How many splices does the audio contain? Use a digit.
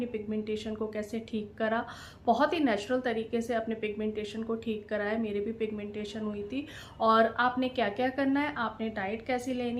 0